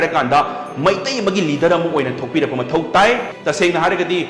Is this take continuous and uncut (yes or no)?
no